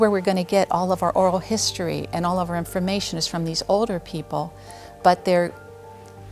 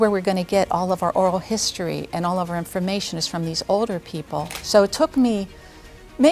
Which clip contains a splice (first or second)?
second